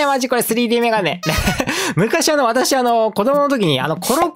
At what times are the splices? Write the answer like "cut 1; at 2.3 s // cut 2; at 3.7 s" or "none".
none